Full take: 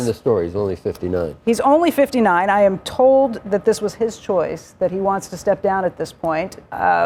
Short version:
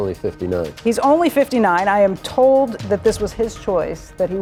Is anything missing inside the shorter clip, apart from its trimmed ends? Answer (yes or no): no